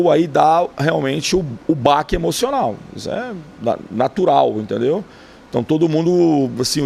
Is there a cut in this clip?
no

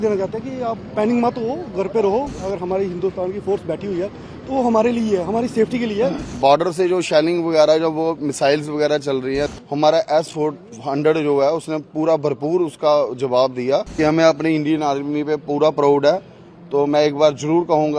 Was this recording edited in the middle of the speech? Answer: yes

